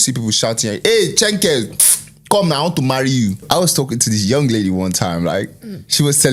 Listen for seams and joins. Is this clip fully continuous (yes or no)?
no